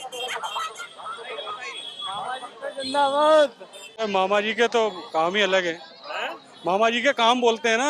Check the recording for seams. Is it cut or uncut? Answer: cut